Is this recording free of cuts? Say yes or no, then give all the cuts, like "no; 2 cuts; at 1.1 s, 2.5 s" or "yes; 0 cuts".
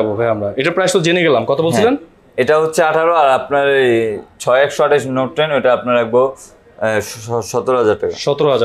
yes; 0 cuts